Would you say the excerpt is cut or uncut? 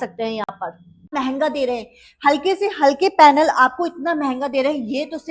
cut